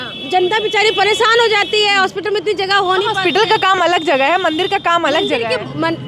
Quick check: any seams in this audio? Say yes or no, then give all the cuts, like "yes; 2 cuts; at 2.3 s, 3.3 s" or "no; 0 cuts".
no; 0 cuts